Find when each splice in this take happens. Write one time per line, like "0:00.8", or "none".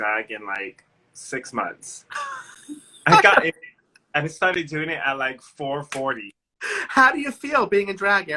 none

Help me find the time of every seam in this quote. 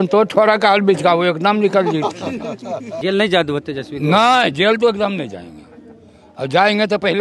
0:02.9

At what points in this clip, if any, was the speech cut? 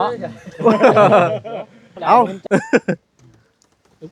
0:02.4

